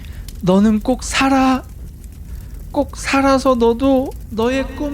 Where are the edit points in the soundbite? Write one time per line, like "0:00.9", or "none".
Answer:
none